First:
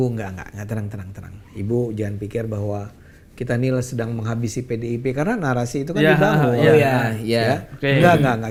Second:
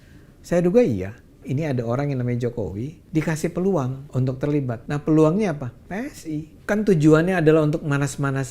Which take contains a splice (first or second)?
second